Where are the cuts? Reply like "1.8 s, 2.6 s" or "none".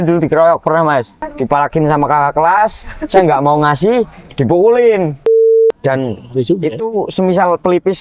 1.2 s, 5.6 s